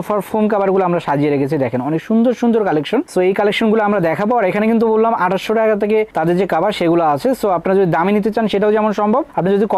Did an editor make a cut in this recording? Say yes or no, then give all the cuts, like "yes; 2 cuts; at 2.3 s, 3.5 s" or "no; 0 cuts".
no; 0 cuts